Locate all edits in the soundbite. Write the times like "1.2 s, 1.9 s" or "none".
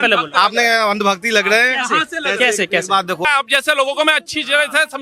3.2 s